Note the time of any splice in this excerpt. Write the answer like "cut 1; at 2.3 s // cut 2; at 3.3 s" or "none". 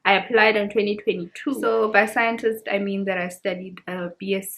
cut 1; at 1.6 s